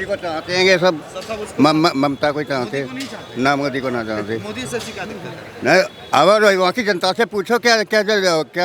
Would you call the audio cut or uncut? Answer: uncut